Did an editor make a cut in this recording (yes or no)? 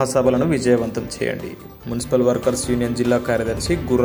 no